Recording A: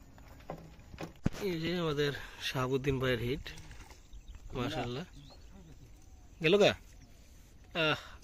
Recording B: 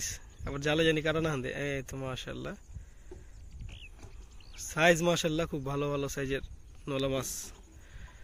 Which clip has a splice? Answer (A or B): A